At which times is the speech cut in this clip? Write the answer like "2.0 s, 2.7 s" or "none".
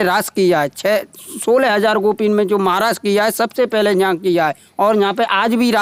none